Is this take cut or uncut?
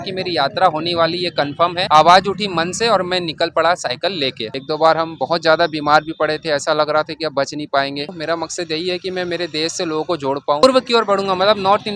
cut